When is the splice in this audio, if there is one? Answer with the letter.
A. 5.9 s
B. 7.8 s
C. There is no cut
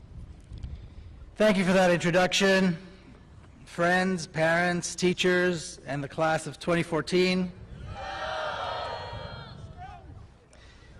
B